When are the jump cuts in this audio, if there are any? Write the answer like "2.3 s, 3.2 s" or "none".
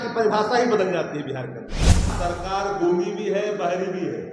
2.1 s